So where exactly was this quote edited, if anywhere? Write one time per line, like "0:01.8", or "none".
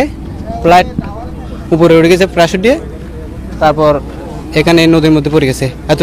none